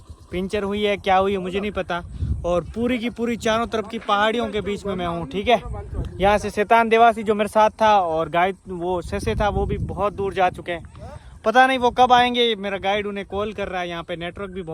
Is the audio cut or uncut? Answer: uncut